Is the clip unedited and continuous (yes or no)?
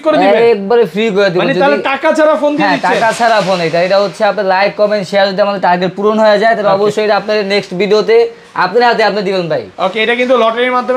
yes